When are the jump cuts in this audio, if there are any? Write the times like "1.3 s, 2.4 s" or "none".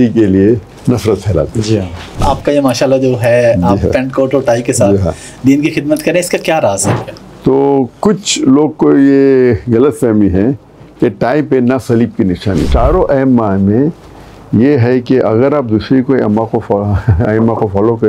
2.2 s, 6.9 s, 12.7 s